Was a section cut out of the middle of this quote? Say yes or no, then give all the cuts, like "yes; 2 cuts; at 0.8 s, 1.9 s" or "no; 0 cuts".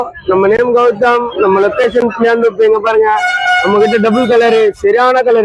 no; 0 cuts